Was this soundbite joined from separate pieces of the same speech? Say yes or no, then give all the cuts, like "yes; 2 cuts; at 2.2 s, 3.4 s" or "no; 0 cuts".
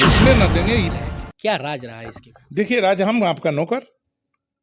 yes; 1 cut; at 0.9 s